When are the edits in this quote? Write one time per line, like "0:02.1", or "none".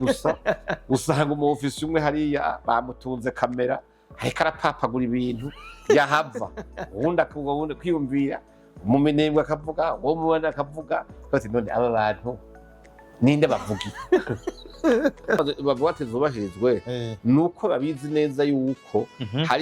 0:15.4